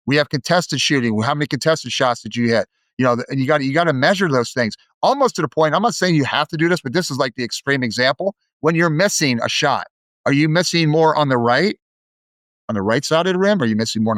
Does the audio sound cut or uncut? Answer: uncut